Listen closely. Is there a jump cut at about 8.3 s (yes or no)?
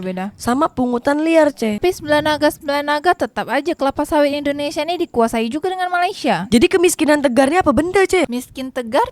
yes